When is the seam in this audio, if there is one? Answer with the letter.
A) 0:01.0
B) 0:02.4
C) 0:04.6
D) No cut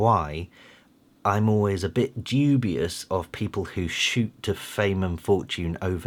D